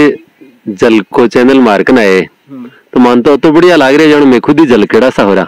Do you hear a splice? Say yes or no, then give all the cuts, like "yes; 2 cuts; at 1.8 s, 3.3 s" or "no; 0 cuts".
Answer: no; 0 cuts